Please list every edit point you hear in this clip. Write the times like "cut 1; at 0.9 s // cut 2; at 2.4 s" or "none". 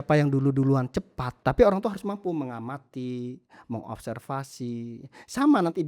cut 1; at 1.2 s

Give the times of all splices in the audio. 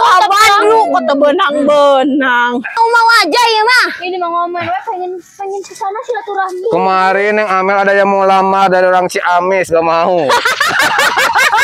cut 1; at 2.7 s

